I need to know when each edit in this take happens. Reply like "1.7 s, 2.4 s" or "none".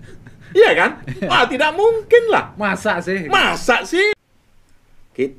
4.1 s